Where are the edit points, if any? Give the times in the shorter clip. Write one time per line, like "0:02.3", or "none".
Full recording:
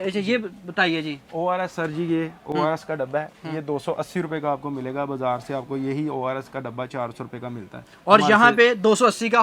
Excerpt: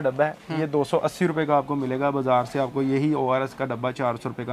none